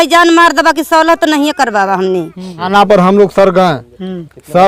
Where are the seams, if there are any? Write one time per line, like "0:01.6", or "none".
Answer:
0:02.7